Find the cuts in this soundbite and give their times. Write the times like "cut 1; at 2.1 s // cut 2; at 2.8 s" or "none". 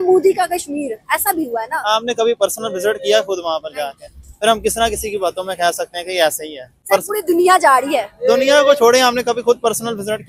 none